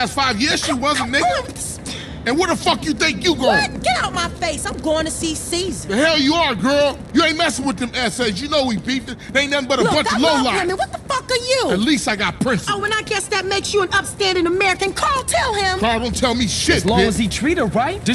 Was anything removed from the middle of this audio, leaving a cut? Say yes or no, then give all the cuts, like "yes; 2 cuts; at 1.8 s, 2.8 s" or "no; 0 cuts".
no; 0 cuts